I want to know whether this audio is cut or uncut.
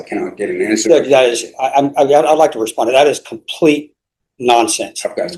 uncut